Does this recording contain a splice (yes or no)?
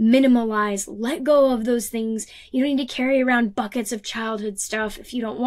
no